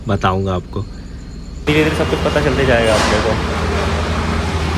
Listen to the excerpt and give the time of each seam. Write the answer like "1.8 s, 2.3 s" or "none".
1.6 s